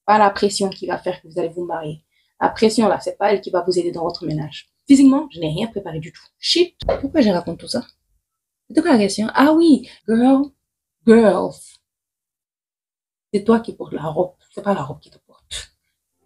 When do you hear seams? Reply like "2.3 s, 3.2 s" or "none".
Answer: 4.8 s, 6.8 s, 9.9 s